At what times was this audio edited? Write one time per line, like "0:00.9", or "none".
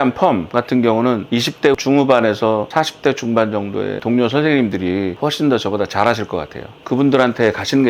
0:01.2
0:04.0